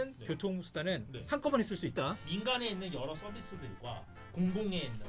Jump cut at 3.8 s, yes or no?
no